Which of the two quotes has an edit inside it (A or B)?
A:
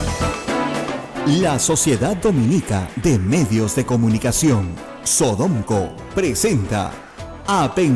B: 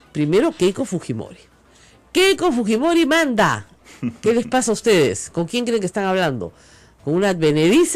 A